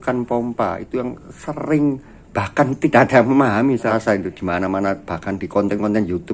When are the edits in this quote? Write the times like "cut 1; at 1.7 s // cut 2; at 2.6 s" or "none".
cut 1; at 3.9 s

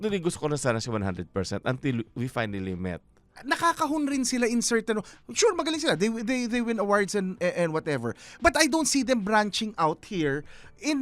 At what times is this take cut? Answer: cut 1; at 3.3 s

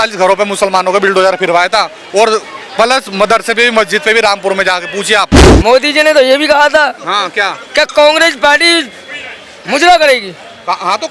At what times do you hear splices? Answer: cut 1; at 5.4 s

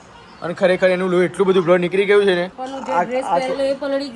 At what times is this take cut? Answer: cut 1; at 2.5 s

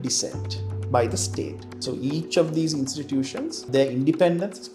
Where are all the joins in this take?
cut 1; at 1.6 s // cut 2; at 3.7 s

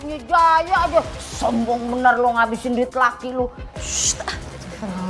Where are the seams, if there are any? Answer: cut 1; at 3.9 s

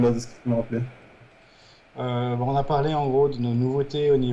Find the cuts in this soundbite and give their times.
cut 1; at 1.1 s

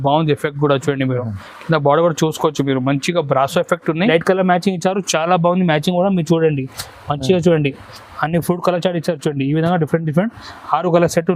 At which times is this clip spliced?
cut 1; at 4.1 s

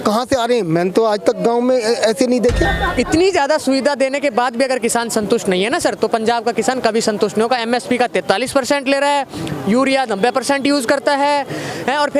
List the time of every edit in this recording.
cut 1; at 2.7 s

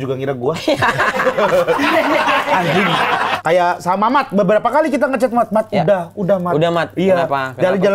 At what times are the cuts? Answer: cut 1; at 3.3 s

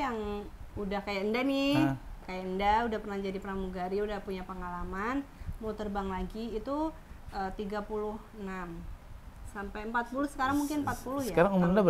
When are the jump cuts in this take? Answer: none

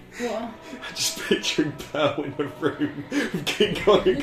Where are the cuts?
none

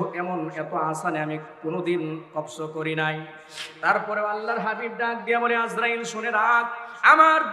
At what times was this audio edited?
none

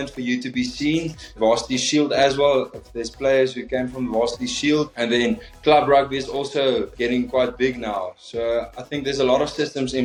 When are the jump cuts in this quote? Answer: none

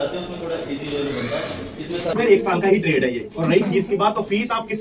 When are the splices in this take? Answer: cut 1; at 2.1 s

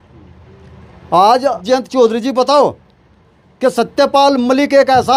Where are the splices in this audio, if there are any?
cut 1; at 1.6 s

